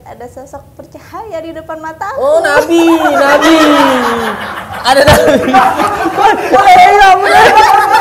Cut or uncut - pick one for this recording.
uncut